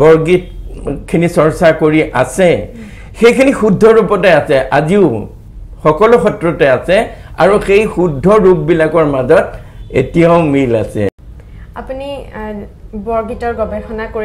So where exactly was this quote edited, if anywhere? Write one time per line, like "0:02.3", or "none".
0:11.1